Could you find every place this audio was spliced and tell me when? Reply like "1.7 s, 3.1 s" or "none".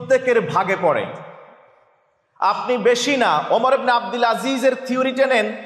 none